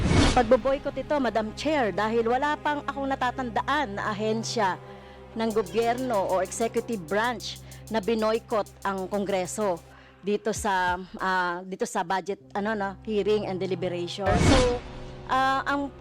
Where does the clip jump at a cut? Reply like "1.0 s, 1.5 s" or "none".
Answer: 14.4 s